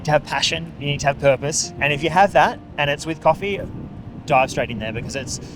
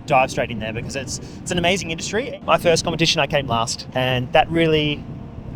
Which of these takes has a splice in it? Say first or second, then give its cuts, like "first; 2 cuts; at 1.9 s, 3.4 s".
second; 1 cut; at 2.3 s